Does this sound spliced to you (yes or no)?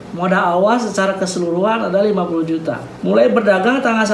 yes